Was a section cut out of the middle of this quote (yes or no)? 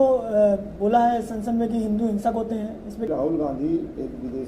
yes